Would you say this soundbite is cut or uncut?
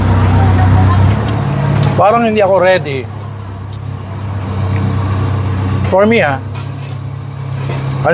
cut